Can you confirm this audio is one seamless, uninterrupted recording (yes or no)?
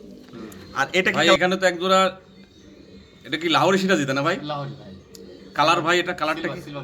no